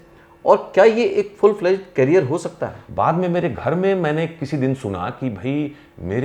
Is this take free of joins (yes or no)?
no